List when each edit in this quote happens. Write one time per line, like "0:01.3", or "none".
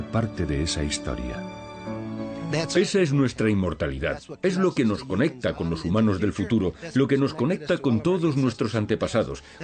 0:08.0